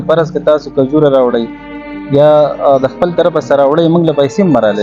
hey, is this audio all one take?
yes; 0 cuts

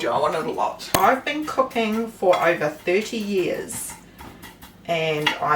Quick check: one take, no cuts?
no; 1 cut; at 1.0 s

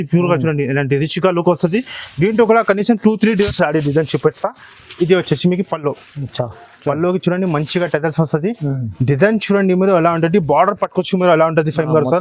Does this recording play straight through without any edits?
no; 1 cut; at 3.5 s

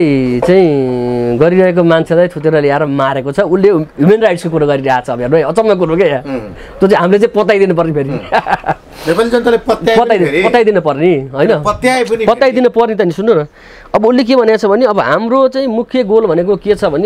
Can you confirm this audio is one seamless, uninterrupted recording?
yes; 0 cuts

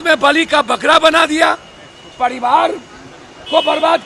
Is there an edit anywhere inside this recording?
no; 0 cuts

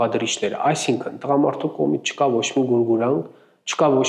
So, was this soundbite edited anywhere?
no; 0 cuts

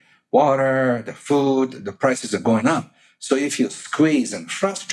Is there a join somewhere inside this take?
no; 0 cuts

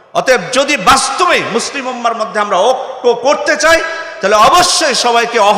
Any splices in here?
no; 0 cuts

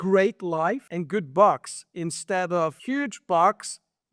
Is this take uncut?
no; 2 cuts; at 0.9 s, 2.8 s

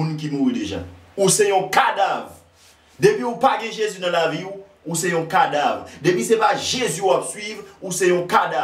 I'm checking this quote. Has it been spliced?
no; 0 cuts

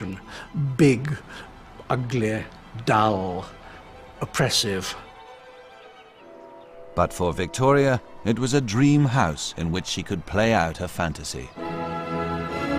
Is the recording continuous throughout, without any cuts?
yes; 0 cuts

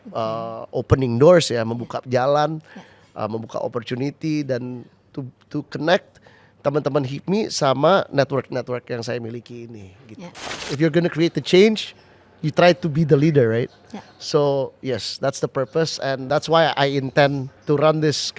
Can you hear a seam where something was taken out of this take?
yes; 3 cuts; at 10.6 s, 16.2 s, 17.5 s

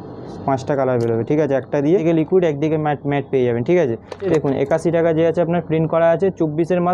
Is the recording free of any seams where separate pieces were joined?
no; 2 cuts; at 2.0 s, 4.2 s

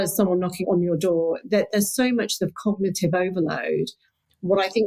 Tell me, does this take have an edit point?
no; 0 cuts

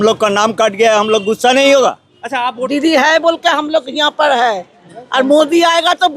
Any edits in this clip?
yes; 1 cut; at 2.6 s

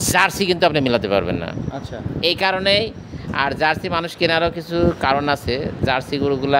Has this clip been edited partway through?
no; 0 cuts

